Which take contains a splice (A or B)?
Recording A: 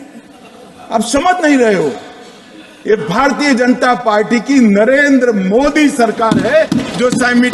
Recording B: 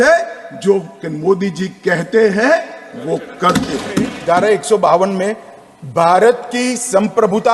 B